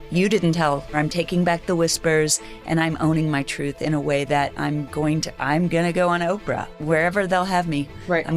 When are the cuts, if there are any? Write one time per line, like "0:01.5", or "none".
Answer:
0:01.0
0:06.8